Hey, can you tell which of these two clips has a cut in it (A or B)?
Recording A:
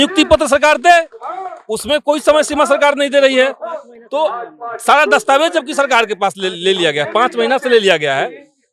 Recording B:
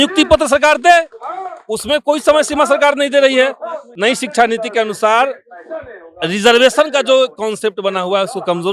B